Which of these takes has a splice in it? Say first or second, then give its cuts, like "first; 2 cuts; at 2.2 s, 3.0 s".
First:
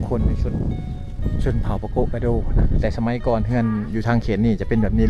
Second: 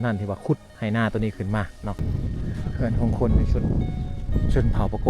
second; 1 cut; at 2.0 s